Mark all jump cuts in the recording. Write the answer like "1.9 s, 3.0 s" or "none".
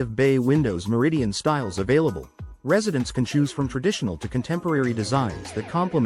none